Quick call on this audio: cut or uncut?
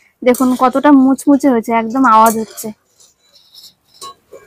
uncut